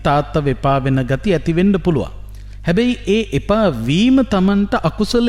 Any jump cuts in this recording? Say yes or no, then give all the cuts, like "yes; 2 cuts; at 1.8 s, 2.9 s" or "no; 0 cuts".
no; 0 cuts